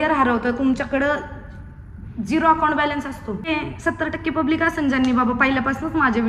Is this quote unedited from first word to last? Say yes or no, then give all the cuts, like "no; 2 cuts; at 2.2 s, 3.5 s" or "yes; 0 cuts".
no; 1 cut; at 3.5 s